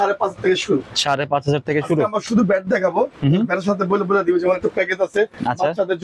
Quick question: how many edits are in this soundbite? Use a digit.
0